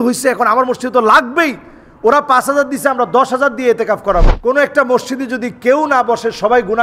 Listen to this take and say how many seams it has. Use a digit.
1